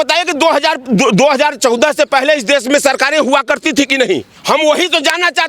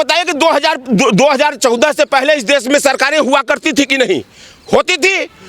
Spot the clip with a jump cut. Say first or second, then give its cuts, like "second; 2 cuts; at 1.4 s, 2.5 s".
first; 1 cut; at 4.3 s